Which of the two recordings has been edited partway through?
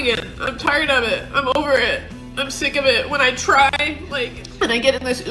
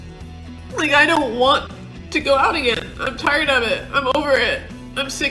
first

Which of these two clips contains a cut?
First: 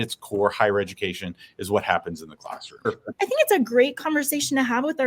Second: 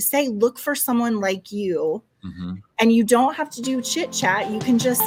first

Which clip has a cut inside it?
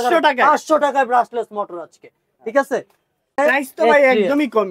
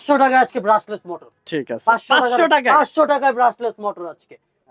first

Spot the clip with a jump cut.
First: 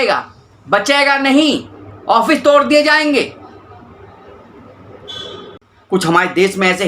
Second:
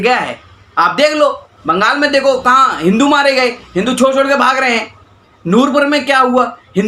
first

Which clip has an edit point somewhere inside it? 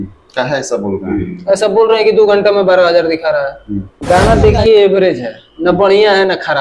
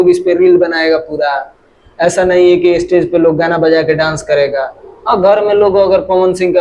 first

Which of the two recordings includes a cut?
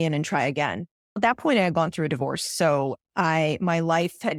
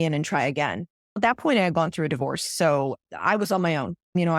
second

